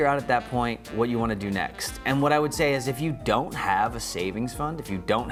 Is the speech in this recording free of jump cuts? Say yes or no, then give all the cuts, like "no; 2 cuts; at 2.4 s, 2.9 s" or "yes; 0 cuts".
yes; 0 cuts